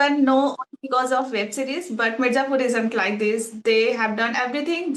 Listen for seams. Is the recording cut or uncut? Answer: uncut